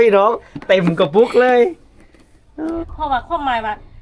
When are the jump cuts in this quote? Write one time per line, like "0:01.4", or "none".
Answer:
0:02.8